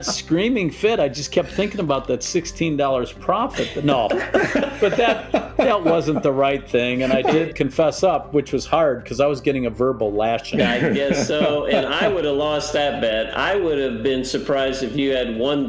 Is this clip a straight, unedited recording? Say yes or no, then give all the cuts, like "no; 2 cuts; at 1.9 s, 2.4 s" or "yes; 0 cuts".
no; 2 cuts; at 7.5 s, 10.4 s